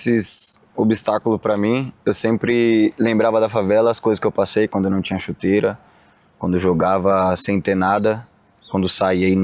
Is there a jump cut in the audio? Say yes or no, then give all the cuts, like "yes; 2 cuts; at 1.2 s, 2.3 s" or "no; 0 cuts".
no; 0 cuts